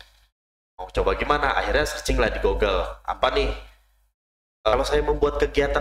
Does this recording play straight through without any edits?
no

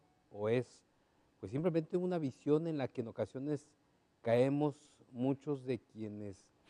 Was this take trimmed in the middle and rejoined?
no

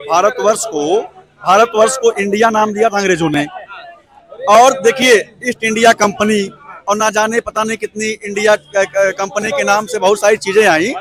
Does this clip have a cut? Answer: no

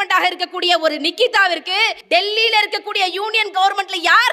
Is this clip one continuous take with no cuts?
yes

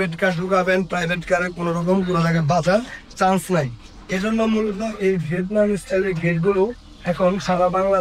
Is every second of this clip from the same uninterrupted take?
yes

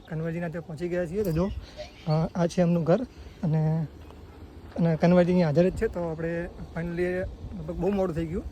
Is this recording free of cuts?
yes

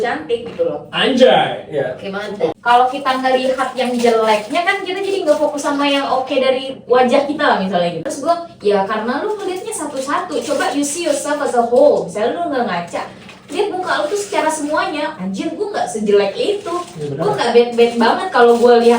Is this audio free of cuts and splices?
no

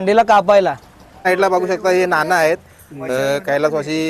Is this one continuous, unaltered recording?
no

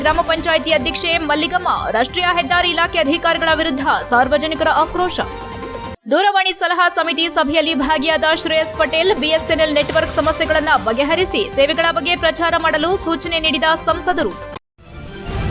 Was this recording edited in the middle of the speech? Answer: yes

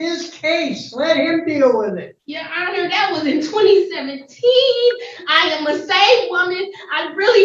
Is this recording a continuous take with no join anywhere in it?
no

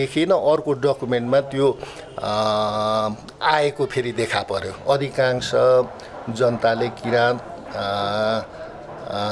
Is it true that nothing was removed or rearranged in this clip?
no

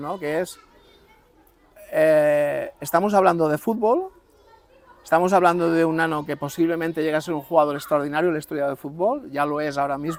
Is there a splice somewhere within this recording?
no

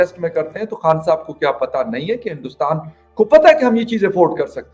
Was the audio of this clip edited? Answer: no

